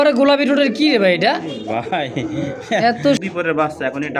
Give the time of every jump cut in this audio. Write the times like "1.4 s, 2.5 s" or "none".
3.2 s